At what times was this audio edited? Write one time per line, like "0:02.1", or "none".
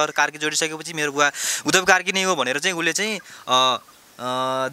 none